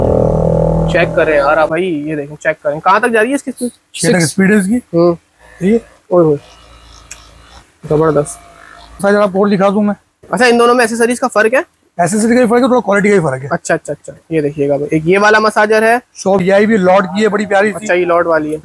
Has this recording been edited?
yes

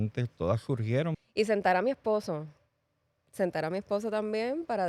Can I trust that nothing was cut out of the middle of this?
no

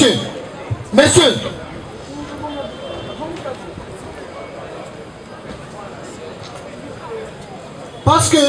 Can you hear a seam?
no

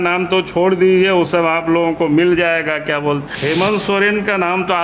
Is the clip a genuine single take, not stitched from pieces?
no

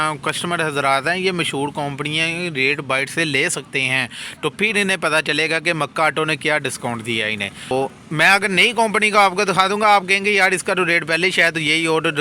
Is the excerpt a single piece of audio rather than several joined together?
no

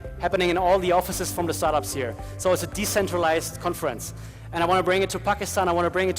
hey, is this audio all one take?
yes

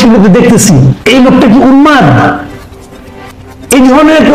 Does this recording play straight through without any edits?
no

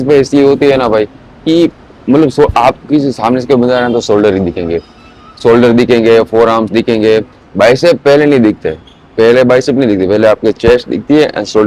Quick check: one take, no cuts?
yes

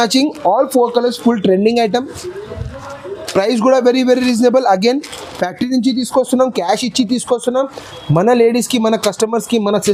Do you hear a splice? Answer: no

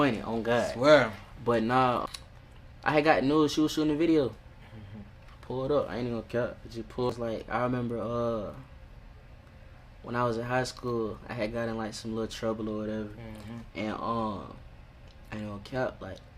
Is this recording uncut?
no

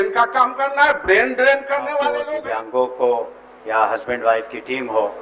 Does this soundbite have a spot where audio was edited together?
yes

